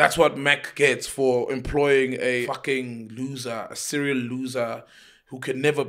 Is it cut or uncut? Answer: cut